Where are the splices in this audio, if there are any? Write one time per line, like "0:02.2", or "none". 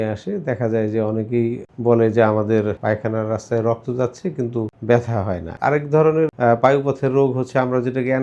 0:01.7
0:02.8
0:04.7
0:05.5
0:06.3